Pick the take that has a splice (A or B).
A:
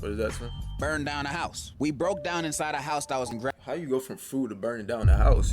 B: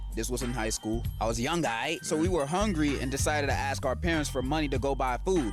A